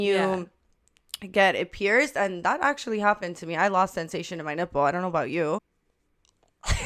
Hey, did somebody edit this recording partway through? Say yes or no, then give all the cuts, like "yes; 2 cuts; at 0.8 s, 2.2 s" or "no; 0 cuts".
yes; 1 cut; at 5.6 s